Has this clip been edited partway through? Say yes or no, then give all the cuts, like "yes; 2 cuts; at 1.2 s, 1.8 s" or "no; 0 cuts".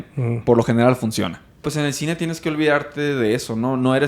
yes; 1 cut; at 1.7 s